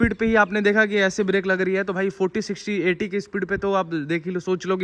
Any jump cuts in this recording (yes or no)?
no